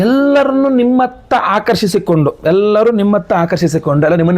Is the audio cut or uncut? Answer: uncut